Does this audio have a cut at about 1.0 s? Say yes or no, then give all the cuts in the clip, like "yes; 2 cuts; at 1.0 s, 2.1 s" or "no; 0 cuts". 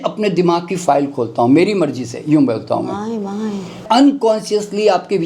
no; 1 cut; at 3.8 s